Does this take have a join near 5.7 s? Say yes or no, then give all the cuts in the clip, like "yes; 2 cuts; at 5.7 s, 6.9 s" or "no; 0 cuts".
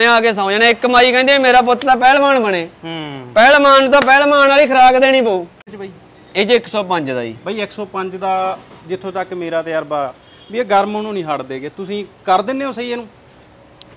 yes; 1 cut; at 5.7 s